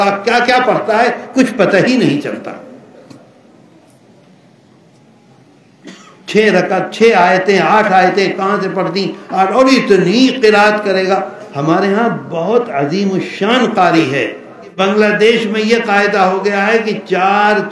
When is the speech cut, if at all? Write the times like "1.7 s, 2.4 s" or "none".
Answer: 14.8 s